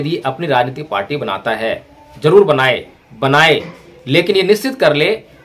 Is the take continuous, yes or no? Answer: no